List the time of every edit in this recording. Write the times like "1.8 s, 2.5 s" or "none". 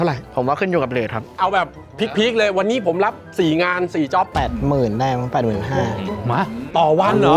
1.3 s, 4.3 s, 6.1 s